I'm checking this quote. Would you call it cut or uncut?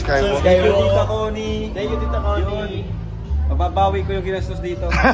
uncut